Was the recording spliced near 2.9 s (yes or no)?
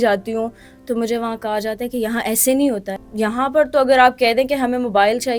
yes